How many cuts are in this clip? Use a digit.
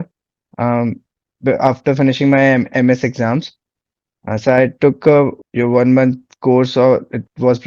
1